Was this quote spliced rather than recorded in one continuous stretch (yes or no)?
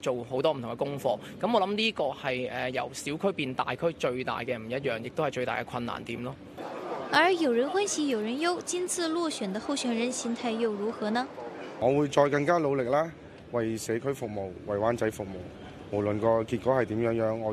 no